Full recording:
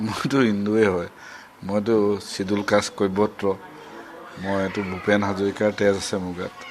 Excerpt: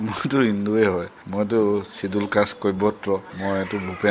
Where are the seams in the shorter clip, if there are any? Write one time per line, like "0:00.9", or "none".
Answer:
0:01.2
0:03.3

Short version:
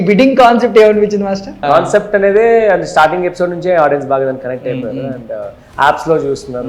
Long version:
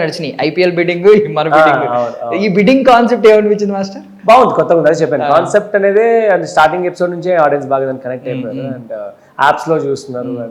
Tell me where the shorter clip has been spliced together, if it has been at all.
0:01.6

